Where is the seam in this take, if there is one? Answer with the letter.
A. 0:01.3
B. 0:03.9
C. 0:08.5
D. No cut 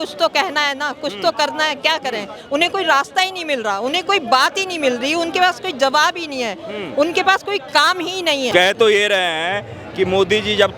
D